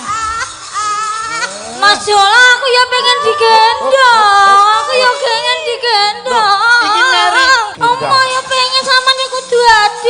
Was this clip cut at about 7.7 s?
yes; 1 cut; at 7.7 s

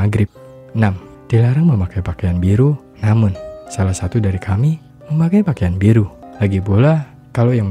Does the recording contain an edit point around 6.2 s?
yes; 1 cut; at 6.2 s

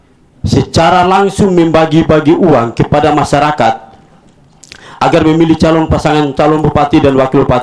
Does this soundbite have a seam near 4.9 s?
no; 0 cuts

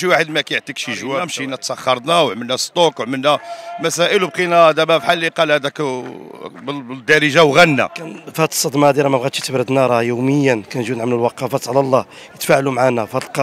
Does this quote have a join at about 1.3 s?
yes; 1 cut; at 1.3 s

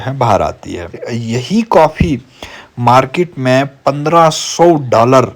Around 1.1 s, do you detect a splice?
yes; 1 cut; at 1.1 s

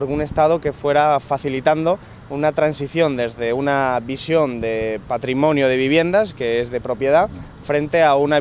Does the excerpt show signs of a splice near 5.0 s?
no; 0 cuts

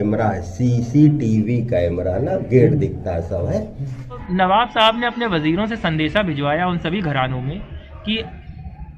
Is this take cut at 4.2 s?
yes; 1 cut; at 4.2 s

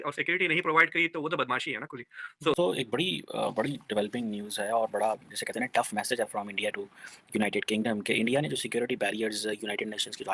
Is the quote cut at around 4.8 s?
no; 1 cut; at 2.5 s

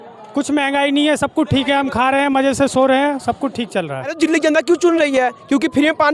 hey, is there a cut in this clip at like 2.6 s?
no; 1 cut; at 4.1 s

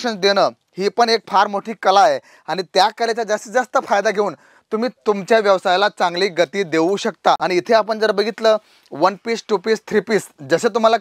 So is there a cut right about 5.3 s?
no; 1 cut; at 7.4 s

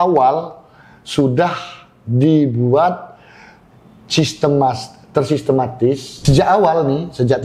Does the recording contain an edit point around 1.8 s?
no; 1 cut; at 6.1 s

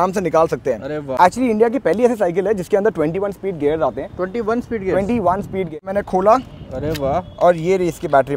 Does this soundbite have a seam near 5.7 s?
yes; 2 cuts; at 1.2 s, 5.7 s

